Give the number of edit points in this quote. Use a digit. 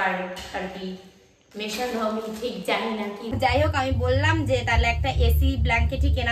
1